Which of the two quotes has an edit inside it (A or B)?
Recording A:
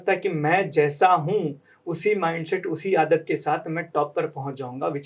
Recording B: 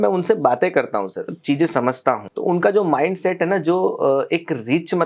B